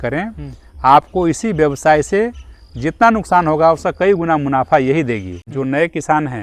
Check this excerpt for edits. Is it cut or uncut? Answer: cut